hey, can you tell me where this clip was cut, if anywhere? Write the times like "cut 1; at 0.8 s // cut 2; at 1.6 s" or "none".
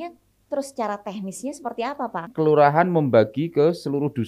cut 1; at 2.2 s